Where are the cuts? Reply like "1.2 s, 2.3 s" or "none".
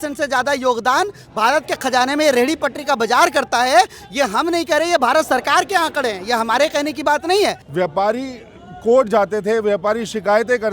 7.6 s